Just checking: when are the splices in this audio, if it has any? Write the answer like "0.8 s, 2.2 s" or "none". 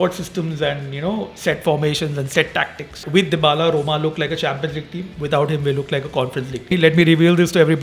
3.0 s, 6.7 s